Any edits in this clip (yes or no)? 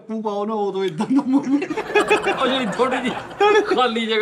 no